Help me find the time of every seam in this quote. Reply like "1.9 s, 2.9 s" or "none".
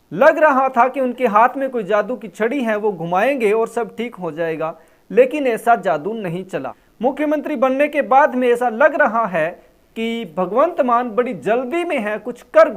6.5 s

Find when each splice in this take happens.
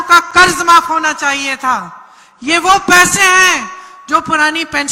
none

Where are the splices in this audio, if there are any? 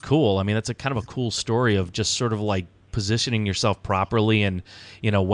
none

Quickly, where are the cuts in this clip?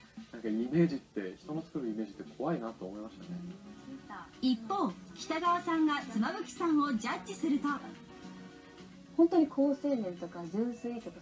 1.3 s

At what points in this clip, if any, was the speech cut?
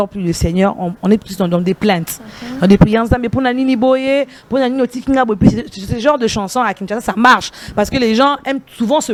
none

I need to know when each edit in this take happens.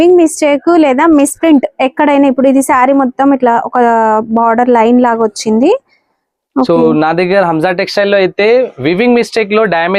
none

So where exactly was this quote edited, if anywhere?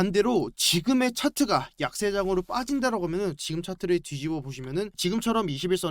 5.0 s

